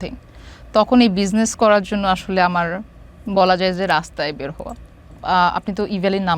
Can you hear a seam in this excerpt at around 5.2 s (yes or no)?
yes